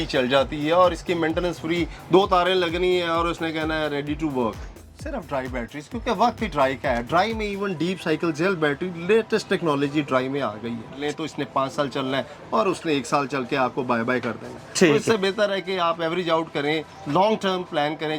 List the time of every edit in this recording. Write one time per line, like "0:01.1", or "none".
0:04.7
0:11.0